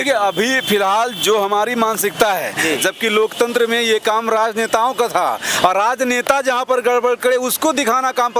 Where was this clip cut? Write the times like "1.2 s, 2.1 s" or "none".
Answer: 2.8 s